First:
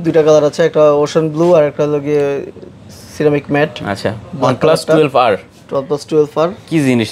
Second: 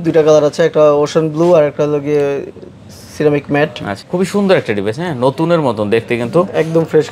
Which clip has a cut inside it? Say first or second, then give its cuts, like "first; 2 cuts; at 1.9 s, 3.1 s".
second; 1 cut; at 3.9 s